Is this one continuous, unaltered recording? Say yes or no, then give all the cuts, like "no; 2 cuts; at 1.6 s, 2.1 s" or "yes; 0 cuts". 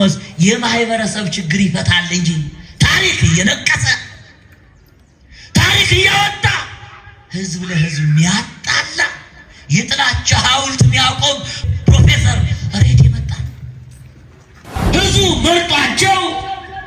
no; 2 cuts; at 11.6 s, 14.7 s